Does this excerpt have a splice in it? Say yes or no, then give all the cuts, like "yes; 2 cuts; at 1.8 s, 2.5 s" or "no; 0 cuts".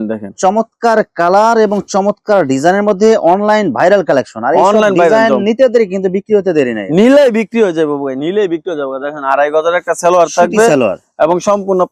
no; 0 cuts